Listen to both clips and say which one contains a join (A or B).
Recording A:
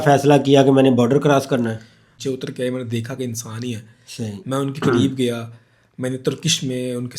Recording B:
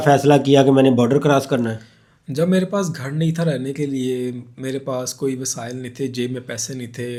A